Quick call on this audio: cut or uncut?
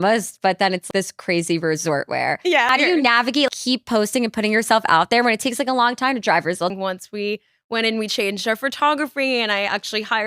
cut